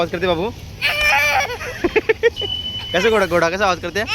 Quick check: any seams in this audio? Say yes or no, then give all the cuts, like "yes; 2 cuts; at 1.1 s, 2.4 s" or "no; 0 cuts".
yes; 1 cut; at 2.2 s